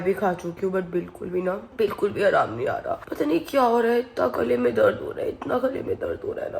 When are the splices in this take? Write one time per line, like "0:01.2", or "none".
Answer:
none